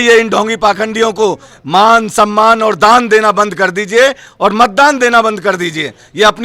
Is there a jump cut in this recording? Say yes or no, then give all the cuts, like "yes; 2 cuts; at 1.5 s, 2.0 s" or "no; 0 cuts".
no; 0 cuts